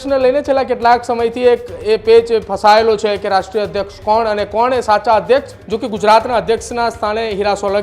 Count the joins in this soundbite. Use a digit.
1